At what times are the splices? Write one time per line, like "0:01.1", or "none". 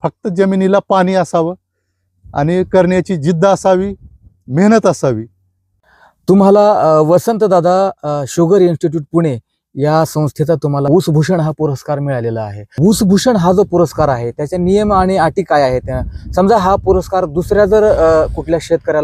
none